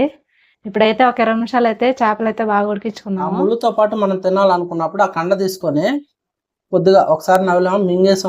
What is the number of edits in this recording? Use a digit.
1